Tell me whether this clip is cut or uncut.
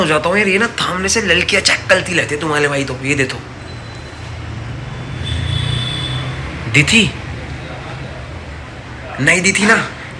uncut